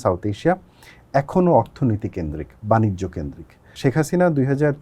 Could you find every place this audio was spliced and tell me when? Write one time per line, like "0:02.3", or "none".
0:03.7

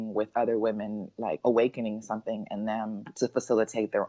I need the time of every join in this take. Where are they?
0:01.4
0:03.0

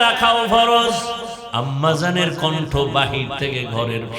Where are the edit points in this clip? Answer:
0:01.3

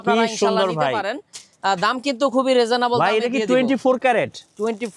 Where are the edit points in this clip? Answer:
none

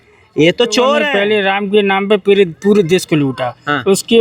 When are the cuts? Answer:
0:01.1

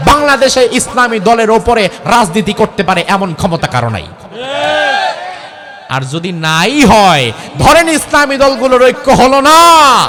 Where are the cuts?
none

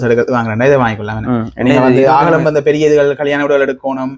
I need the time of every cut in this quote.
none

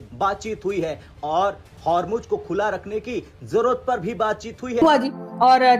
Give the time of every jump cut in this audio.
0:04.8

